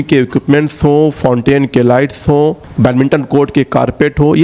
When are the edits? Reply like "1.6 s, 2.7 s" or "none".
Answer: 2.6 s